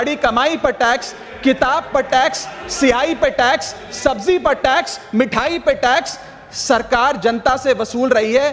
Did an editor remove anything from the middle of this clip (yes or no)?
no